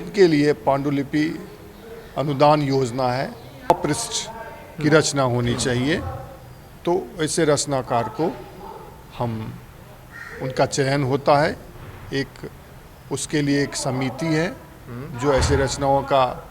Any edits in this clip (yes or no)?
yes